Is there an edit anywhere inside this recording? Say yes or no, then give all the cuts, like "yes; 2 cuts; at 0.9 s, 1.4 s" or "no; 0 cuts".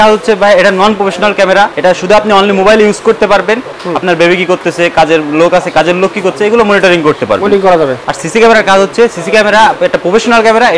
yes; 3 cuts; at 1.7 s, 3.8 s, 8.0 s